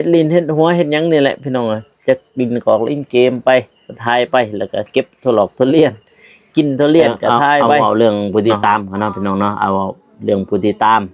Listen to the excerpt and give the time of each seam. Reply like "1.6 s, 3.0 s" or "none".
7.8 s